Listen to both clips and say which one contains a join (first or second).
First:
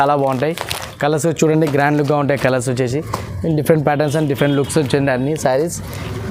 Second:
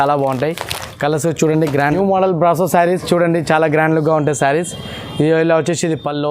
second